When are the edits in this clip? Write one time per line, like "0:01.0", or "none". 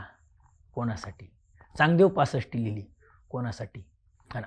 none